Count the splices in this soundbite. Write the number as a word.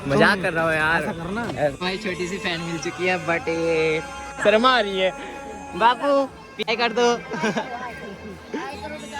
three